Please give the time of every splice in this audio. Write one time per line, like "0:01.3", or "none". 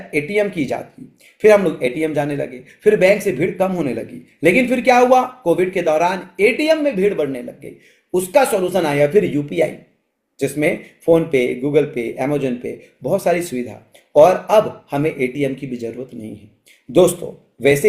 none